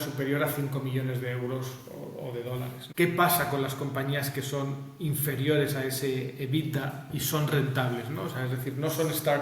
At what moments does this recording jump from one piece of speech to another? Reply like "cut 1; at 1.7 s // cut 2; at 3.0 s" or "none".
cut 1; at 2.8 s